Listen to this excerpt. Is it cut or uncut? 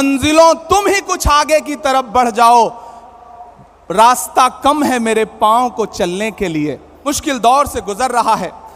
cut